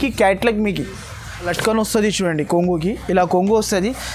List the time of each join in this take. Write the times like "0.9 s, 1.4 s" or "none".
1.5 s